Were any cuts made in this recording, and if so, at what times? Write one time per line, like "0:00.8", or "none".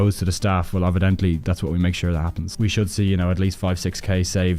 0:02.4